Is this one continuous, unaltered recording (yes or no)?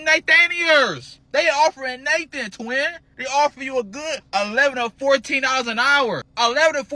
yes